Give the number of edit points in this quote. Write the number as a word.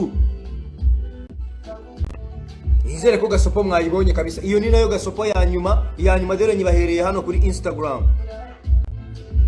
one